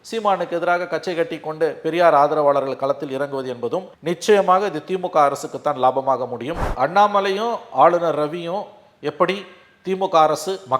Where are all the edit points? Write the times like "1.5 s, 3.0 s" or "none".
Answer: 6.6 s